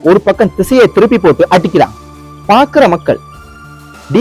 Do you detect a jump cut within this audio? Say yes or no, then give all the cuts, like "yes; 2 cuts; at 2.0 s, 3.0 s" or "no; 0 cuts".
yes; 1 cut; at 2.4 s